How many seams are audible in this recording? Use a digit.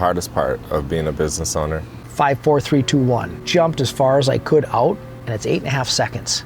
3